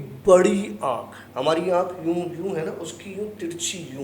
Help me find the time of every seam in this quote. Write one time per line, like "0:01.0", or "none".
0:01.2